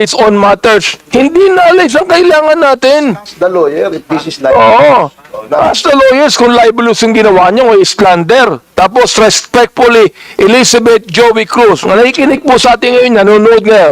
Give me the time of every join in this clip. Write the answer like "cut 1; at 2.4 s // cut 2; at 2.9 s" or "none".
cut 1; at 8.6 s